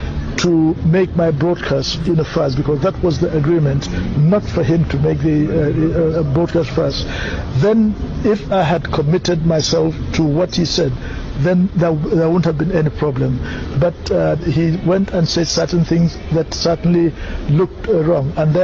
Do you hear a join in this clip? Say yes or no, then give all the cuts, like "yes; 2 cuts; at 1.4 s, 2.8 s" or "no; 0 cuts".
no; 0 cuts